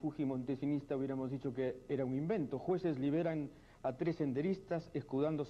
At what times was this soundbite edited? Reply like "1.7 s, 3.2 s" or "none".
none